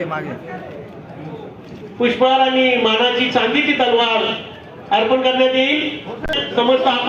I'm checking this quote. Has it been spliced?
no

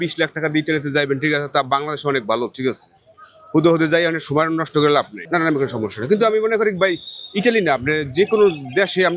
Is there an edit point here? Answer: yes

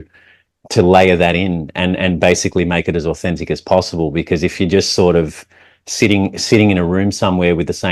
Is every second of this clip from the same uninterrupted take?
yes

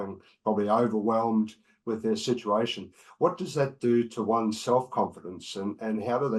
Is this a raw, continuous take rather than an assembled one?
yes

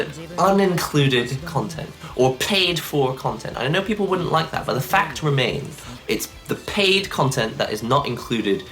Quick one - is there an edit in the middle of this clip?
yes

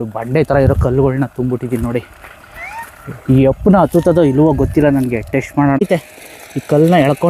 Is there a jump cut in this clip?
yes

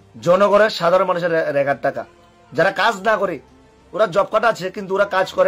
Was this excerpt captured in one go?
yes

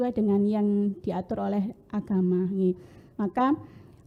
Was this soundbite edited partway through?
no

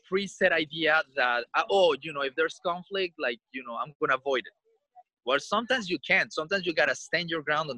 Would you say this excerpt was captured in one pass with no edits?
yes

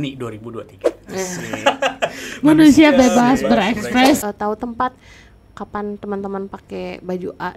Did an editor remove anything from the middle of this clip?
yes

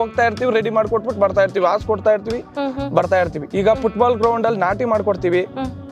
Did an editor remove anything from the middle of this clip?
no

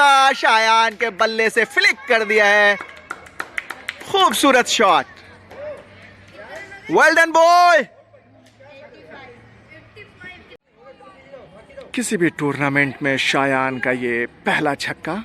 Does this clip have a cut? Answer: no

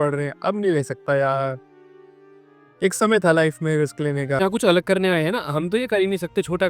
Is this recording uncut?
no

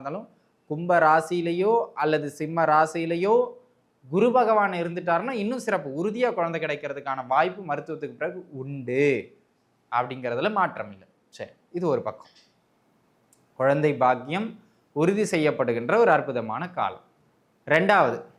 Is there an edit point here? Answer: no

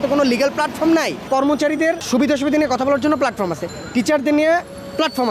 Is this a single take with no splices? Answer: no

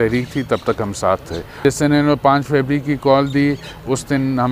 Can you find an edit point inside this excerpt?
yes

